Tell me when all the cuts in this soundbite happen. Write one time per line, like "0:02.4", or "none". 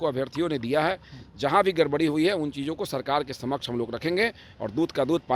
none